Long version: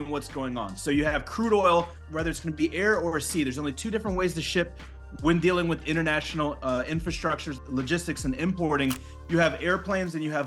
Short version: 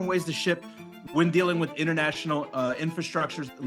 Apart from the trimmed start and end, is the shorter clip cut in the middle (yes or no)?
no